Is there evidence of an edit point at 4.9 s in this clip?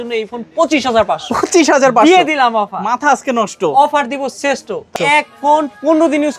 yes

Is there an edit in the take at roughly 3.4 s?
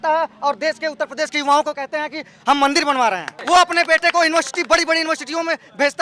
yes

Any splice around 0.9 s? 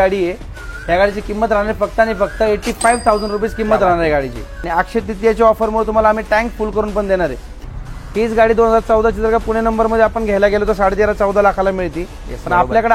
no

